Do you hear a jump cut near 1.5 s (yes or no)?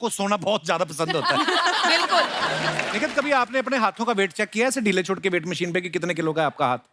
no